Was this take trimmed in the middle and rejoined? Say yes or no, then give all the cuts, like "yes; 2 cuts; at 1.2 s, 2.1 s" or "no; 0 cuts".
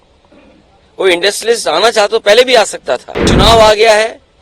yes; 1 cut; at 3.3 s